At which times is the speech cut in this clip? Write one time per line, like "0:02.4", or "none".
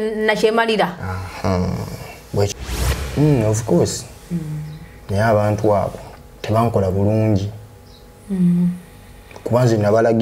0:02.5

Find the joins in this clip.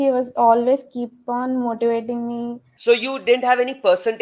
0:02.6

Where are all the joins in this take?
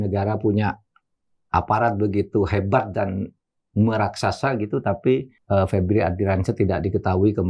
0:05.3

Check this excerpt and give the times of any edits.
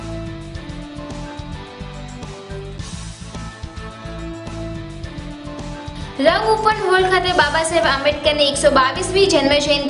0:01.3

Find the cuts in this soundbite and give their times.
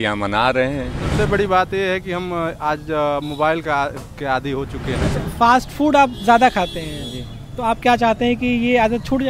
0:01.0
0:05.1

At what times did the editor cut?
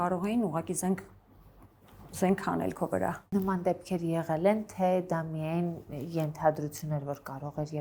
none

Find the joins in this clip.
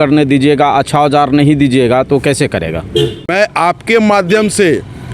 0:03.3

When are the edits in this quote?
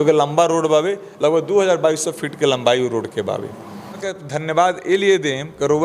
0:04.1

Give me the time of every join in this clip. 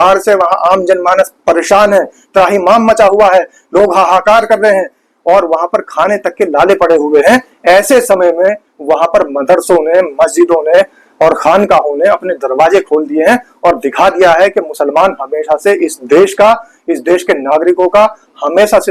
none

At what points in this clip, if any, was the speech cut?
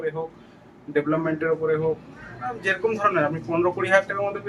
none

